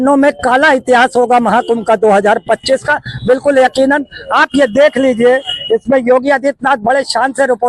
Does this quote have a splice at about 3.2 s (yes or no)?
no